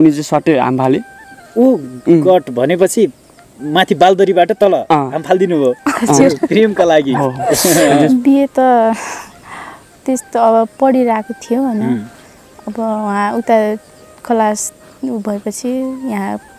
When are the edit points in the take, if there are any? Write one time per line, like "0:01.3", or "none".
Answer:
0:08.1

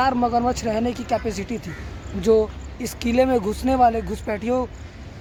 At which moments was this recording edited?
none

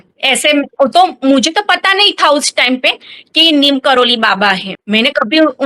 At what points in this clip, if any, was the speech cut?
0:04.7

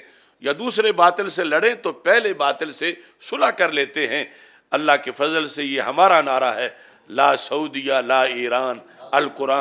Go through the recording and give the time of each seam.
none

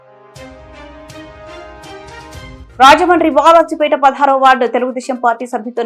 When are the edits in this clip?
none

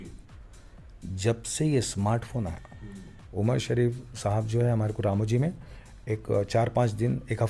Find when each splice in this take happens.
0:03.2

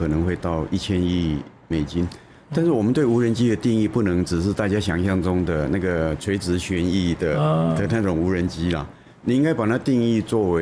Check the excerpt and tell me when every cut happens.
none

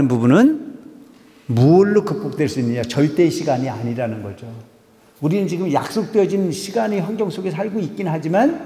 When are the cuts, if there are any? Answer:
none

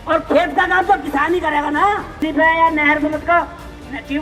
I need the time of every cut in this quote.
0:02.2

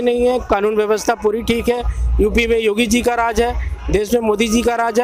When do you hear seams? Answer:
none

